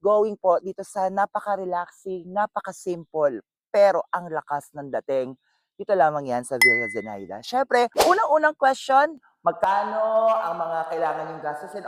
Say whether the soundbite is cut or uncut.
uncut